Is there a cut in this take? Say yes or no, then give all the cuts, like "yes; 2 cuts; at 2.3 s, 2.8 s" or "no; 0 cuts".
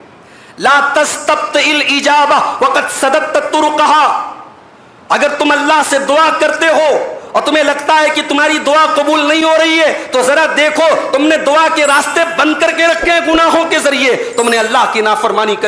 no; 0 cuts